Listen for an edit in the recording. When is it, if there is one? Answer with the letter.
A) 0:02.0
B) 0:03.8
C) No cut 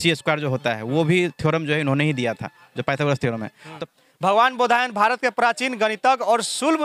B